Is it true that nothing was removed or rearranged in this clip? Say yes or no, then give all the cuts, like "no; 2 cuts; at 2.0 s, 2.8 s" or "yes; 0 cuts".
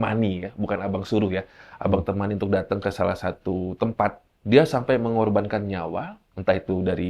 no; 1 cut; at 4.3 s